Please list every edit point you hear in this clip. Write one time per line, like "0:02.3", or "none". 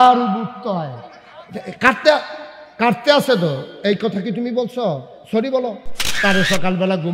0:06.1